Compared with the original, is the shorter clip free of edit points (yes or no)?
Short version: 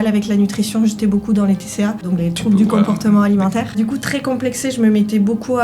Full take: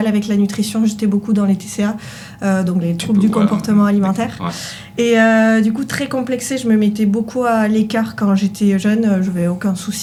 no